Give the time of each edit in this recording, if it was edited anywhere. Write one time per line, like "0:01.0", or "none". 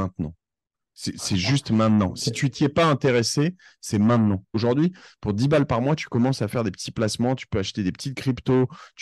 0:04.5